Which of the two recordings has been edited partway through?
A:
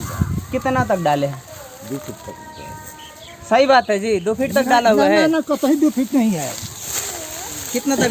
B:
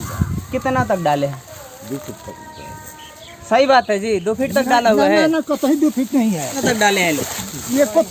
B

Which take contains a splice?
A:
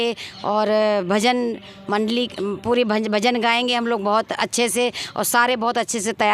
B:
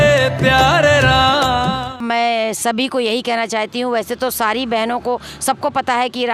B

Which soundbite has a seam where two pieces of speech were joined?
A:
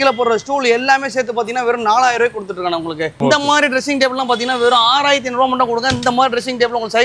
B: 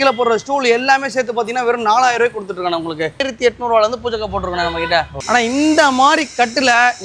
B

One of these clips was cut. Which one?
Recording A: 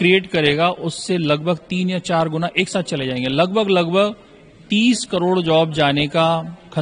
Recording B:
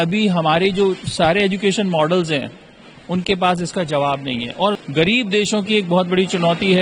B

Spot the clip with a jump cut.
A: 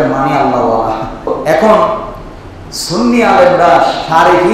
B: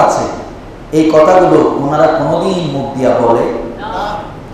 A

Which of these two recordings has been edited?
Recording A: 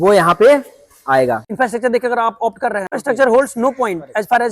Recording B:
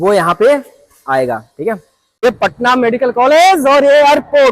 A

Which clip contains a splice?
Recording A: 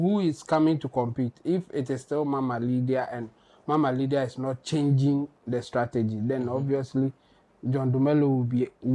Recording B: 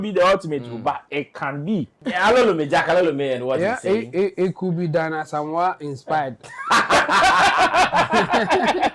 B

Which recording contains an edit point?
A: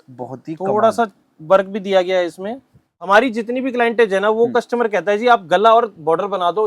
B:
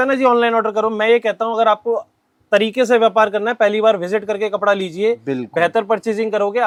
A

